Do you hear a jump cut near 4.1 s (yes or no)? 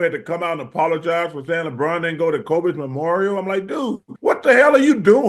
yes